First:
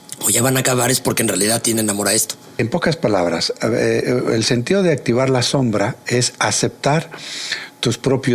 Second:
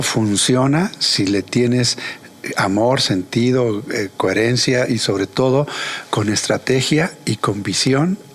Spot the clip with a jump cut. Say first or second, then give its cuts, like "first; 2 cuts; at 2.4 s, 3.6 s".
first; 1 cut; at 2.6 s